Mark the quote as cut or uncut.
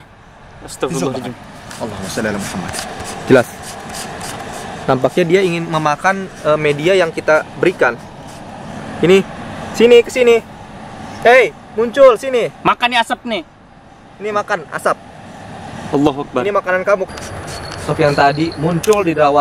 cut